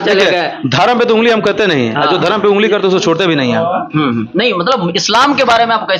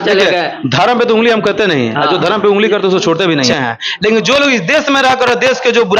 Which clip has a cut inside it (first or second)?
second